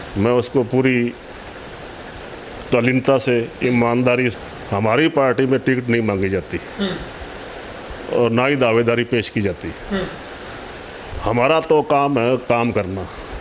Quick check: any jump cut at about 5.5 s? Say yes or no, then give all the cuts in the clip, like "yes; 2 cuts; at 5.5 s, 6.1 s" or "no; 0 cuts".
no; 1 cut; at 4.3 s